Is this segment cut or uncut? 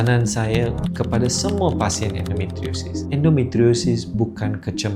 uncut